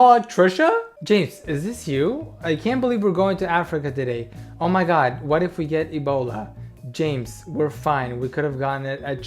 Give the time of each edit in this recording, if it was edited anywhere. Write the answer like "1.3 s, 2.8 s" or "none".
0.9 s